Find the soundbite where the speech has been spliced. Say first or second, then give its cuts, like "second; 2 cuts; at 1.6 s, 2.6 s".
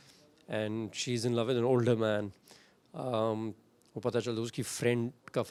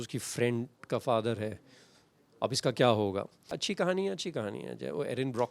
second; 1 cut; at 3.6 s